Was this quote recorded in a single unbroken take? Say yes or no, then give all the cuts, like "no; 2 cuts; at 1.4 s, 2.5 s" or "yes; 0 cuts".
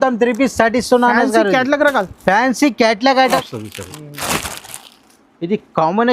no; 1 cut; at 3.3 s